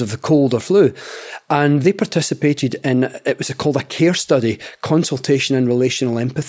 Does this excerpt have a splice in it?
yes; 1 cut; at 1.8 s

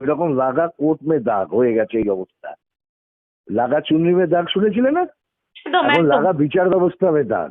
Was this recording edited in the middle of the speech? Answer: no; 0 cuts

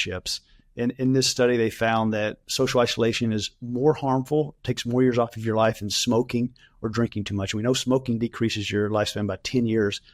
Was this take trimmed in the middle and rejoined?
yes; 1 cut; at 3.6 s

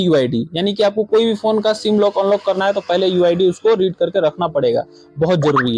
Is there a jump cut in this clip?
no; 0 cuts

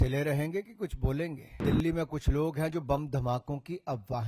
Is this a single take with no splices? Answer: no; 1 cut; at 1.6 s

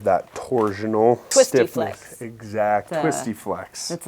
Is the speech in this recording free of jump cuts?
no; 2 cuts; at 1.3 s, 2.9 s

